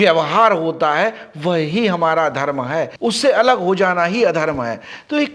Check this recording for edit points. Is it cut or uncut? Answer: uncut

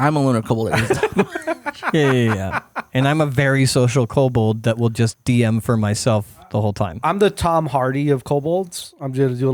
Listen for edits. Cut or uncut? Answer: uncut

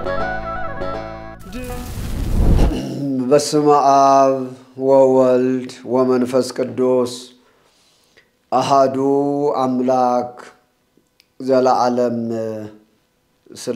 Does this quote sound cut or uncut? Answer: cut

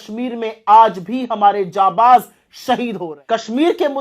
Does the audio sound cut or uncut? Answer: cut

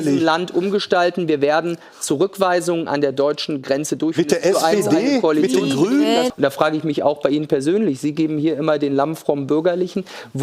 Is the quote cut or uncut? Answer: cut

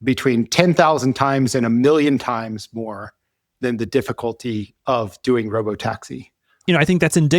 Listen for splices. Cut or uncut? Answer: cut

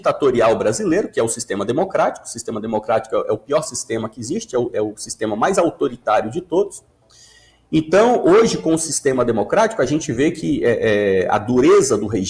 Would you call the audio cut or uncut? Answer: uncut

